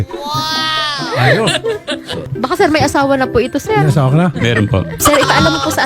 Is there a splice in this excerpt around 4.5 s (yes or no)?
yes